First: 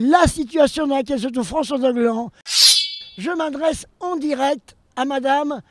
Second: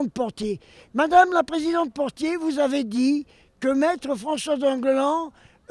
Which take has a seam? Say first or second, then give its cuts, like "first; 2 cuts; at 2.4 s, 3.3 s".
first; 1 cut; at 2.7 s